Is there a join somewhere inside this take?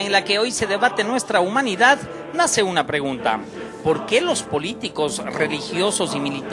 yes; 1 cut; at 4.2 s

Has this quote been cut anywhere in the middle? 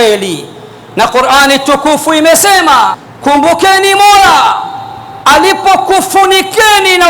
yes; 1 cut; at 3.1 s

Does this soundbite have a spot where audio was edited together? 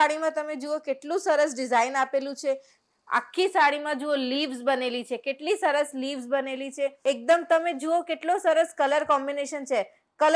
yes; 1 cut; at 7.0 s

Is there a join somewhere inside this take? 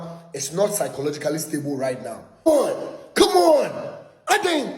no; 0 cuts

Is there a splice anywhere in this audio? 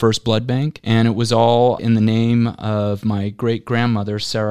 no; 0 cuts

